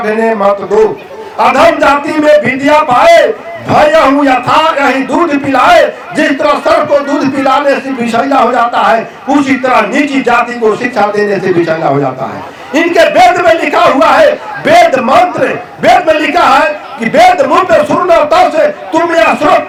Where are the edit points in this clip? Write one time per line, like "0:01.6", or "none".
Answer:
none